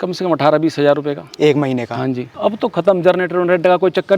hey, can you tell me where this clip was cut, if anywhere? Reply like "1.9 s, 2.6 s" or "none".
2.3 s